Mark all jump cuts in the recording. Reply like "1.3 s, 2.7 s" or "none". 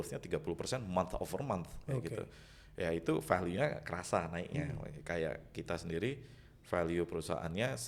none